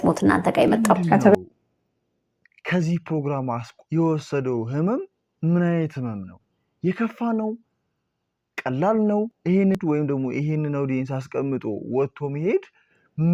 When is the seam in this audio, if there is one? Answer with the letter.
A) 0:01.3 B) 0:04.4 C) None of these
A